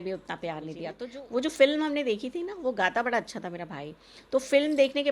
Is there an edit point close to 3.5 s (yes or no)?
no